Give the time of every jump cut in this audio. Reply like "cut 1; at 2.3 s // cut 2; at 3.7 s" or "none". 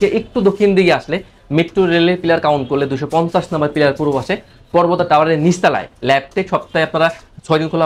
none